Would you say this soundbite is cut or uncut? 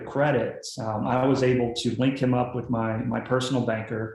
uncut